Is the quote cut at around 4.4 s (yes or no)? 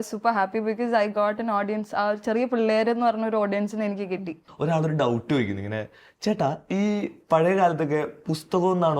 yes